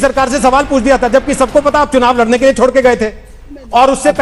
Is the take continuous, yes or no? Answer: yes